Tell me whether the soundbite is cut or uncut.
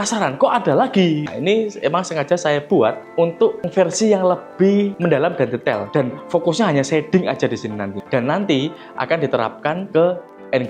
cut